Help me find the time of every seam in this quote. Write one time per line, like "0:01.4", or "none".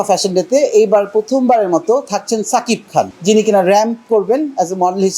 0:03.1